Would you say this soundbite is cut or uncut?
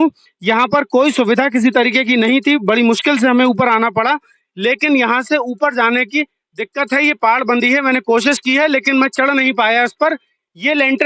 uncut